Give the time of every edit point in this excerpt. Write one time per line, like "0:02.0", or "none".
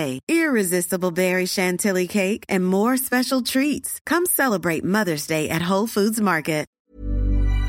0:06.8